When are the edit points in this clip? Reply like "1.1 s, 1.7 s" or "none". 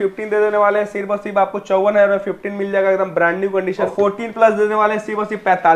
3.9 s